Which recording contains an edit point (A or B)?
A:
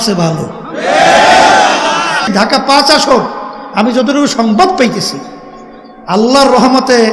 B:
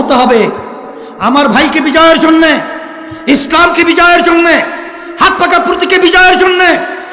A